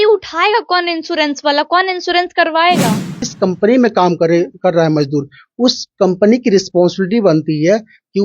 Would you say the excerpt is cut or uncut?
cut